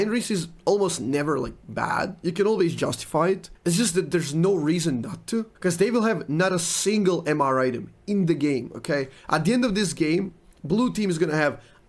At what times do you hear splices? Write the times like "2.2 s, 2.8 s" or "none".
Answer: 3.5 s, 5.5 s